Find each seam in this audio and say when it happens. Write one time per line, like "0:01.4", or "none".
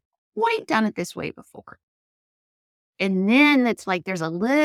none